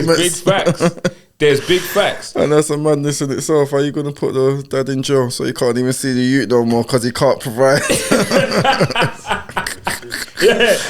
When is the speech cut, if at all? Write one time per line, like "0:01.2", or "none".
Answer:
none